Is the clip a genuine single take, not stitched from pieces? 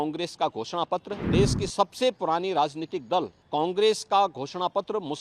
no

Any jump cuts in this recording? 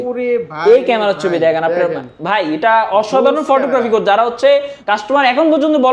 yes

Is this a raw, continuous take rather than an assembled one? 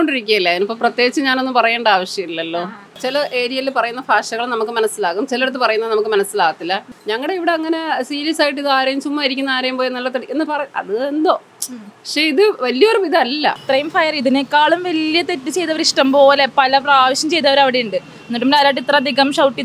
no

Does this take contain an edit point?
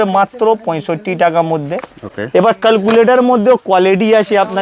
no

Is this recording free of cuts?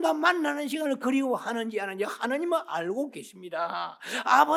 yes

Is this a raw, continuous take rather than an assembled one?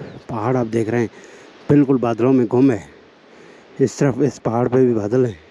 yes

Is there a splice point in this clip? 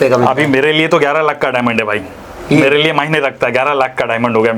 no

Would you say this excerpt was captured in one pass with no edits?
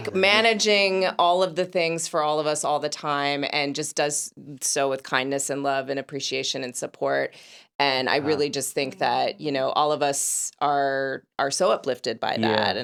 yes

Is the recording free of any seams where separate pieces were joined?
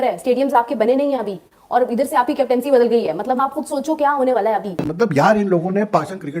no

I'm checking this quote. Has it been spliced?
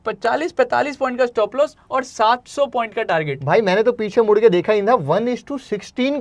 no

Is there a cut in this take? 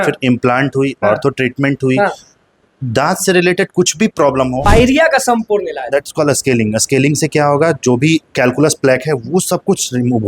yes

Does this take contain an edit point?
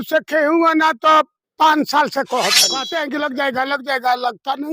yes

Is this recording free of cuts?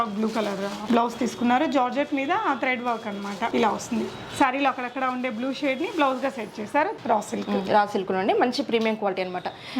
no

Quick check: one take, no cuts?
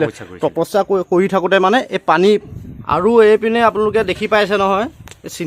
no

